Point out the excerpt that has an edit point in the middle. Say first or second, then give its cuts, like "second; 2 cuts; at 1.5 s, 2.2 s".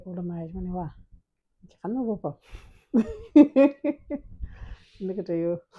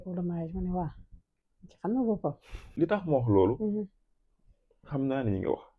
second; 1 cut; at 2.7 s